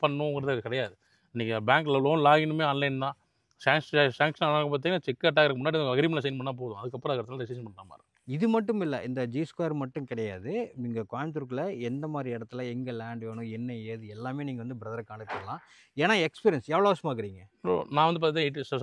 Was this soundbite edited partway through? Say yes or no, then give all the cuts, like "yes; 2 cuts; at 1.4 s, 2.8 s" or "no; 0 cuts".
no; 0 cuts